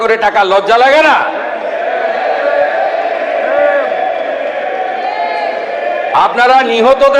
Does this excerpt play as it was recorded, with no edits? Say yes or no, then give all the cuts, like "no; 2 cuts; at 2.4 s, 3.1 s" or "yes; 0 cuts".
yes; 0 cuts